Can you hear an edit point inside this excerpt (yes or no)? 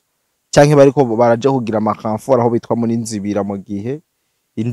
no